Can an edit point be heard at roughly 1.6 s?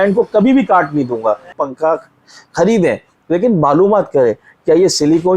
yes; 1 cut; at 1.6 s

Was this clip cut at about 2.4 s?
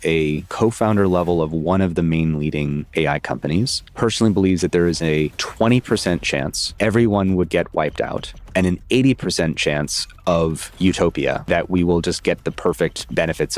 no; 0 cuts

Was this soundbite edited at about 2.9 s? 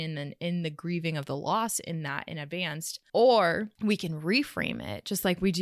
yes; 2 cuts; at 2.9 s, 3.7 s

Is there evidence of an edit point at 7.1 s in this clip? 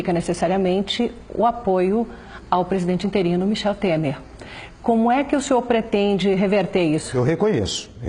yes; 1 cut; at 7.1 s

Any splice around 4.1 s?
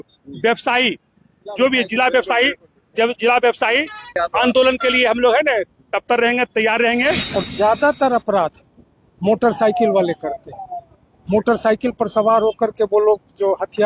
yes; 2 cuts; at 4.1 s, 7.3 s

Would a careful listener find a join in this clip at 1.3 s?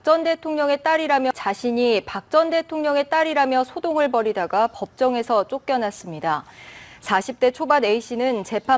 yes; 2 cuts; at 1.3 s, 3.6 s

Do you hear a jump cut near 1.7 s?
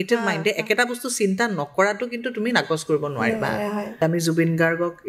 no; 1 cut; at 4.0 s

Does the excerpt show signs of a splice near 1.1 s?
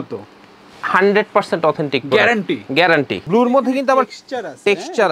no; 1 cut; at 3.2 s

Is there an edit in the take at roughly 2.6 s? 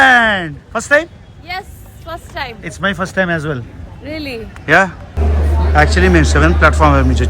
no; 1 cut; at 5.1 s

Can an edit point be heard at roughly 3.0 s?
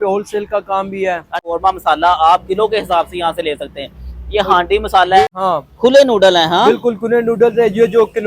no; 2 cuts; at 1.5 s, 5.2 s

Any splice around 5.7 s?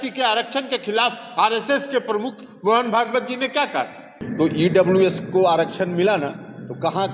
no; 1 cut; at 4.2 s

